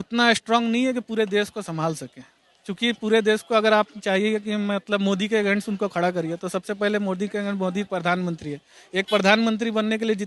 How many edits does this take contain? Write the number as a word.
zero